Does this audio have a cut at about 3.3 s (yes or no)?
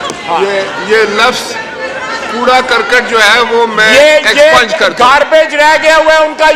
no